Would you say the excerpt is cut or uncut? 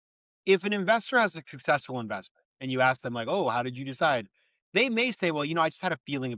uncut